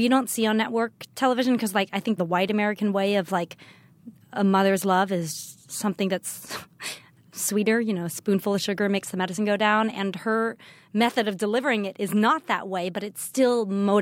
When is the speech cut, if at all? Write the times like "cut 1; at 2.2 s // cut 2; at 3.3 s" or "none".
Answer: cut 1; at 2.2 s // cut 2; at 7.3 s